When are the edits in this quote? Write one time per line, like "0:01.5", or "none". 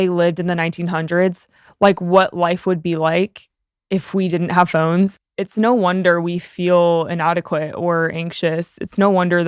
0:05.2